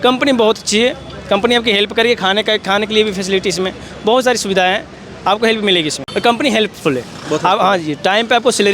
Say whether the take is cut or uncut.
cut